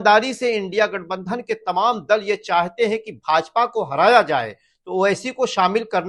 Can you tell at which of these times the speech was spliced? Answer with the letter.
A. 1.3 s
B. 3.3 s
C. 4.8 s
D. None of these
D